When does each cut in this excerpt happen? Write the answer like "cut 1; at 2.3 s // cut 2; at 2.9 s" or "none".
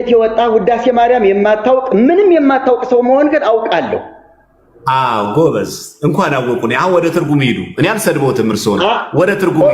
none